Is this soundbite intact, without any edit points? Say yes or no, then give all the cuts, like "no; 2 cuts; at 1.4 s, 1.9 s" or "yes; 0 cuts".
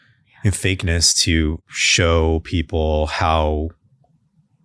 no; 1 cut; at 1.7 s